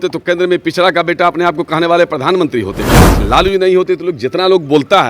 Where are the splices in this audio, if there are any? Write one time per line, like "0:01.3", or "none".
0:03.2